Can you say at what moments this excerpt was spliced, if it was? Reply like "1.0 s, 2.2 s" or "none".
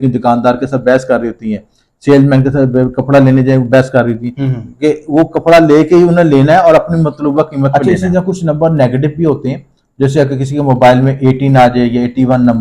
7.7 s